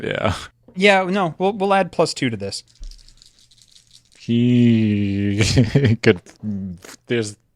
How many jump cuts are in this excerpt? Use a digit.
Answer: 1